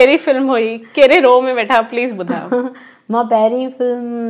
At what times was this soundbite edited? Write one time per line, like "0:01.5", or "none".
none

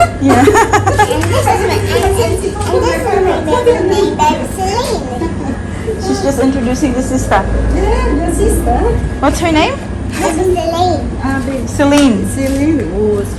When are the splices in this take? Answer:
none

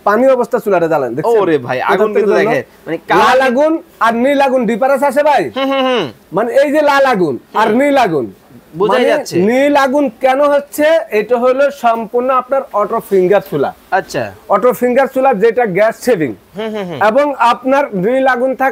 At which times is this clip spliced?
none

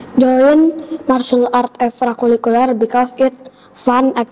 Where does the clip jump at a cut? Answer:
none

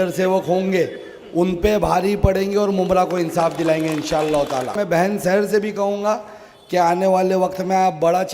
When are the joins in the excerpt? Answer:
0:04.7

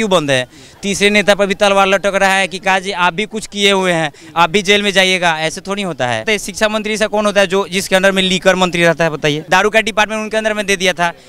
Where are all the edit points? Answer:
0:06.2
0:09.4

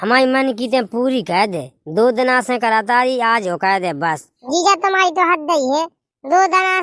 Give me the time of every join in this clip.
0:04.4

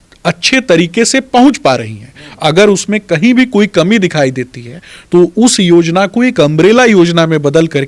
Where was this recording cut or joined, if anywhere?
none

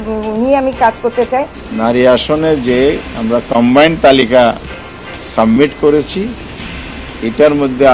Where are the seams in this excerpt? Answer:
0:01.5

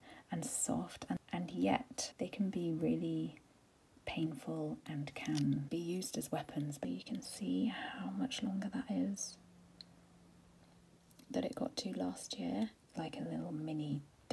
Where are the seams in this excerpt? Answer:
0:01.2
0:02.0
0:05.7
0:06.8
0:12.8

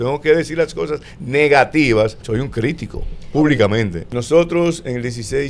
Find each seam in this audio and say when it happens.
0:02.2
0:04.0

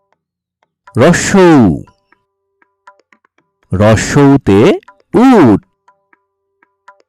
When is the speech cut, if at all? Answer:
0:01.9
0:03.5
0:05.8

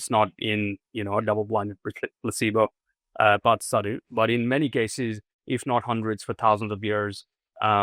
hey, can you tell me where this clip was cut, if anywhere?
none

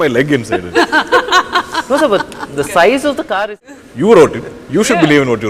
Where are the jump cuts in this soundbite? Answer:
0:03.6

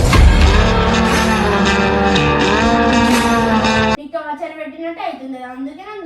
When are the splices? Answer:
0:04.1

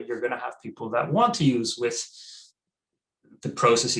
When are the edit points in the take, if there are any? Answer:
none

